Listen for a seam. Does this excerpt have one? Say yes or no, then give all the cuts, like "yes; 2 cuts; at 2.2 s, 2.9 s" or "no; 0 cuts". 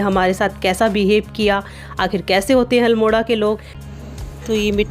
yes; 1 cut; at 3.7 s